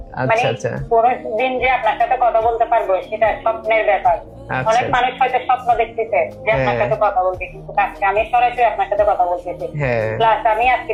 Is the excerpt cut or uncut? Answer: uncut